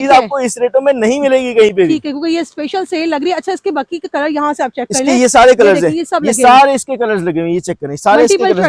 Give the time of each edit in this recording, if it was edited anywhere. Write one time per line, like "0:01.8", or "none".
none